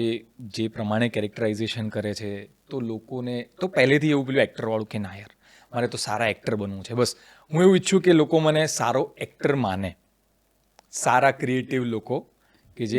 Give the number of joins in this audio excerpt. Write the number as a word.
zero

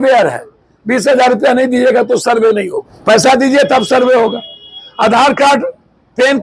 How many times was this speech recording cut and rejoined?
one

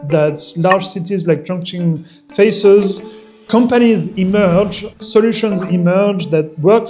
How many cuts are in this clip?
one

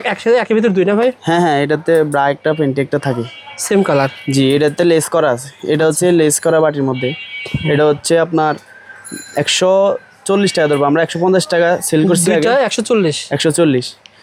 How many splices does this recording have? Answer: zero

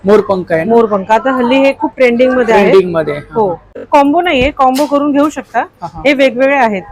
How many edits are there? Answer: one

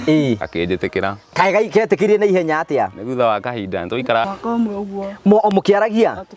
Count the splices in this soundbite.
one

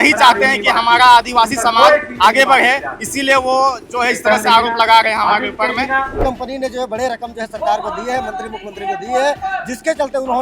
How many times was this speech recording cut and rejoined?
one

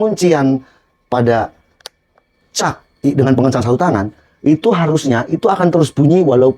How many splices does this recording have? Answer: zero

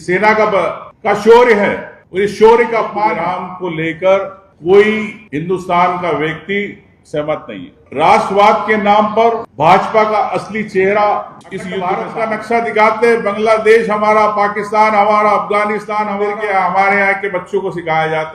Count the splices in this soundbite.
three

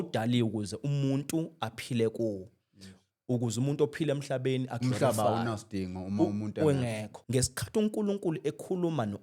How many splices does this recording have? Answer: one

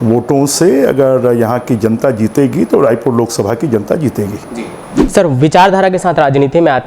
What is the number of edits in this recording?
one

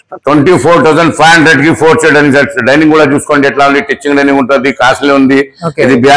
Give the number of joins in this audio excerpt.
zero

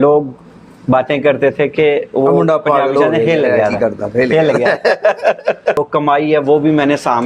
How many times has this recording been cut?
one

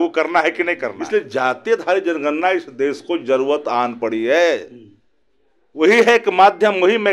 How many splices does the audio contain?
one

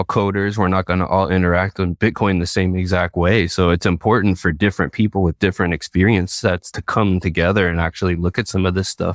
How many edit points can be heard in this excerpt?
one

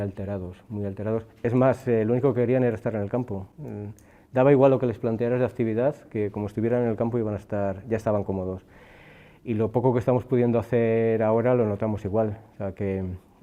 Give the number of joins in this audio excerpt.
zero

